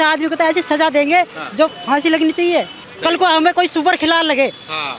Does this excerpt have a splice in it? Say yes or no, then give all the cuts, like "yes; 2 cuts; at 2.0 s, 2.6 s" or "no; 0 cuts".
yes; 2 cuts; at 1.8 s, 2.8 s